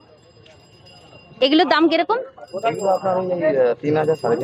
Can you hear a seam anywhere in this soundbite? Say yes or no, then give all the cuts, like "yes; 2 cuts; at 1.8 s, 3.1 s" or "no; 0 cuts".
no; 0 cuts